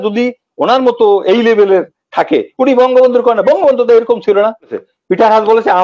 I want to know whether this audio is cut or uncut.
cut